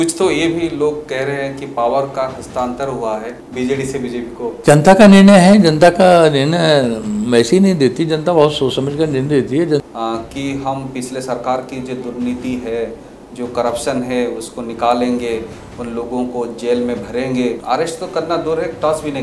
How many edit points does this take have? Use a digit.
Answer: 4